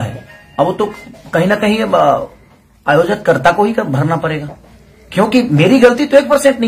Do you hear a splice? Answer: no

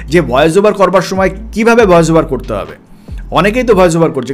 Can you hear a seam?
no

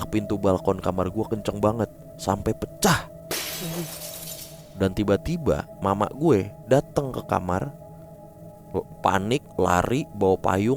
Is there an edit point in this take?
no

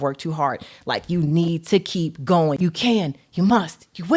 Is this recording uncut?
no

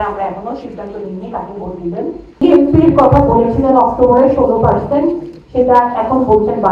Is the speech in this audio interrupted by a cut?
yes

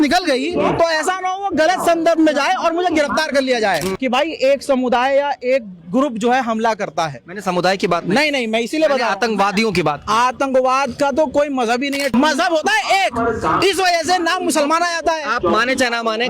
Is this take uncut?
no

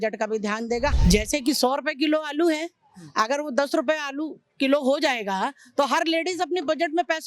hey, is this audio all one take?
no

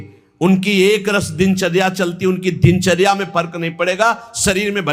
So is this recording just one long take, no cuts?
yes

